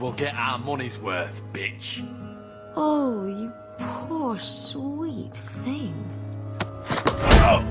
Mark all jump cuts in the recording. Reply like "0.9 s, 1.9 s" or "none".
none